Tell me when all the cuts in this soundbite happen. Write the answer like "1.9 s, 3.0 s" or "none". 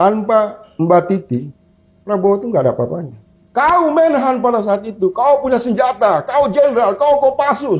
none